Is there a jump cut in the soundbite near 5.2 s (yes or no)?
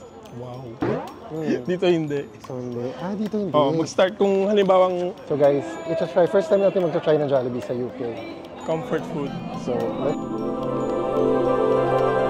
yes